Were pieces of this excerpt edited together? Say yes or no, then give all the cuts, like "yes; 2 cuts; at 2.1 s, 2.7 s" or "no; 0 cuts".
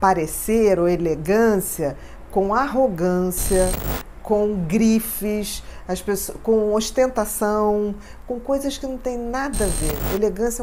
no; 0 cuts